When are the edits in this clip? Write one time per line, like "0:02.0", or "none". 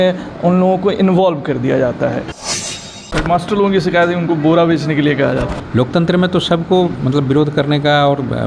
0:02.4
0:05.6